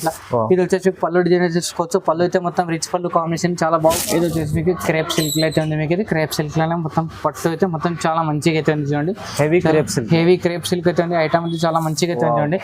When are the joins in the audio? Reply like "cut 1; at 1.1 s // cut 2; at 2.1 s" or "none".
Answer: cut 1; at 3.9 s